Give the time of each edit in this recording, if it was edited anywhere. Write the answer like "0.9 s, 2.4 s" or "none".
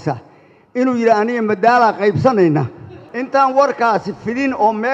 none